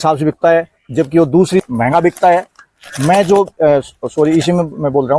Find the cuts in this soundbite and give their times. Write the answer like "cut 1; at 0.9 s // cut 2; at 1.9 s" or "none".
cut 1; at 1.6 s